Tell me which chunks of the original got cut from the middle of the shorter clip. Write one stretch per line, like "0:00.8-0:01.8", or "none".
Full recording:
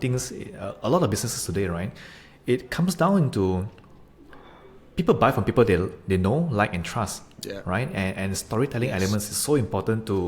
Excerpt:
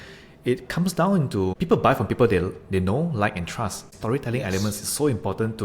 0:03.6-0:04.9
0:07.3-0:08.4